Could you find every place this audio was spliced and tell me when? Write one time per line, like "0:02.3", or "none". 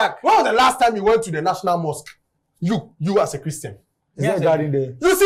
none